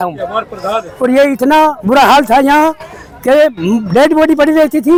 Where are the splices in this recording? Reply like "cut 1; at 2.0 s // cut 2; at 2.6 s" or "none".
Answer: none